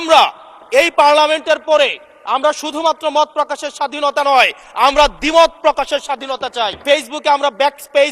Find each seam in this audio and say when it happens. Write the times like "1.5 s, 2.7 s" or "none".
6.8 s